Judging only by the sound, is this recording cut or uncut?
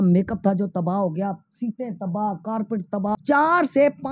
cut